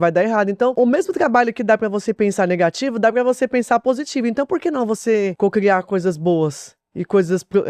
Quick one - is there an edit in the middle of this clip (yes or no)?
yes